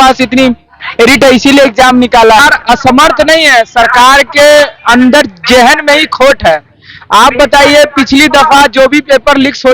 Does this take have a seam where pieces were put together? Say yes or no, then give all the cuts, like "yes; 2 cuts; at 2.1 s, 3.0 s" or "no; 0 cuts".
yes; 1 cut; at 2.4 s